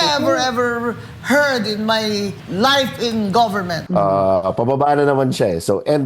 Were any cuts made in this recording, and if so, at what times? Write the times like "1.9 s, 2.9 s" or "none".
2.4 s, 3.7 s